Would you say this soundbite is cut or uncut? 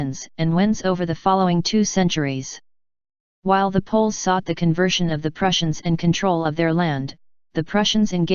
uncut